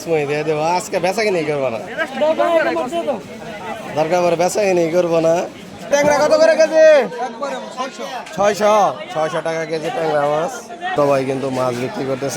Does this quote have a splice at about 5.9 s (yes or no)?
yes